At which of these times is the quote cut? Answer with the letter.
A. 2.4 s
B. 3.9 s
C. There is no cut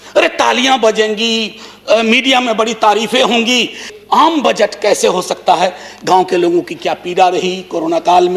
B